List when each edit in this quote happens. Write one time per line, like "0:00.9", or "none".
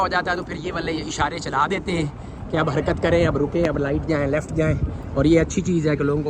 none